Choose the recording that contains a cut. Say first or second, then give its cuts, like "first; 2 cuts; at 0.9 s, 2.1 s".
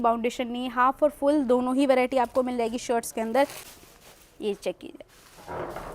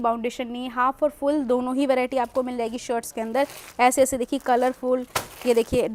first; 1 cut; at 3.6 s